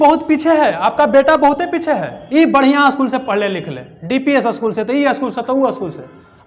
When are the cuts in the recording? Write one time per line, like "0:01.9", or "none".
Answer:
0:02.1